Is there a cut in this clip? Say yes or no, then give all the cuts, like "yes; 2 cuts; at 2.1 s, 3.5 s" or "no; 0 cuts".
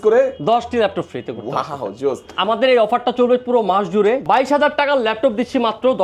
yes; 1 cut; at 4.2 s